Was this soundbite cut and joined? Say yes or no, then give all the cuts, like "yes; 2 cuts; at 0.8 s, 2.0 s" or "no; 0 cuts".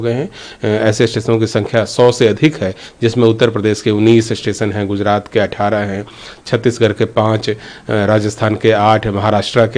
no; 0 cuts